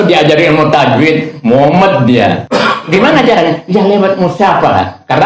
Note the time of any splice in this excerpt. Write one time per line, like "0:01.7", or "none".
0:02.4